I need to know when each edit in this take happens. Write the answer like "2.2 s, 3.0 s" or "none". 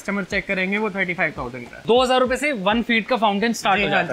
1.6 s